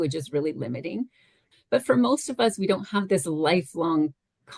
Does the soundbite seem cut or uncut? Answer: cut